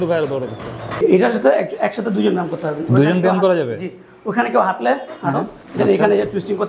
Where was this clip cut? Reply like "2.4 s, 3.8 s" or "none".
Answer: 1.0 s, 5.6 s

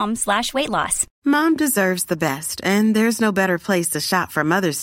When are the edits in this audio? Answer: 1.0 s

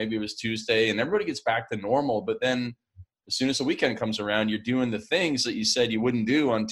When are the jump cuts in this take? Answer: none

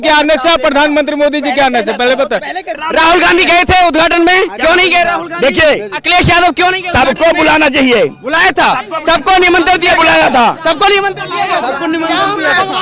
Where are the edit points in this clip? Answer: 2.7 s

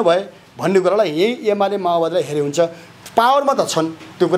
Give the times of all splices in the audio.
none

